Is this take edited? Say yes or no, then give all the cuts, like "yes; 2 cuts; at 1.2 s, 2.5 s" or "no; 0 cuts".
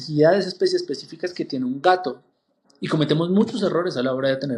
no; 0 cuts